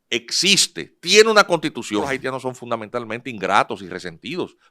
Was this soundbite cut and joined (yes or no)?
yes